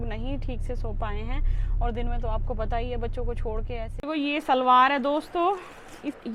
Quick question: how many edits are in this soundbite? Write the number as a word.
one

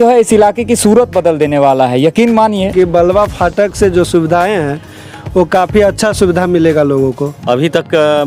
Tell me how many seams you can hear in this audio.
two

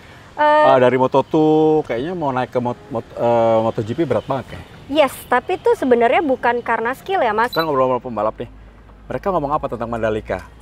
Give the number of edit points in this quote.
one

